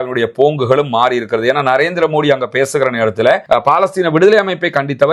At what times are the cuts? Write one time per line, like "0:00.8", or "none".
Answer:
0:03.4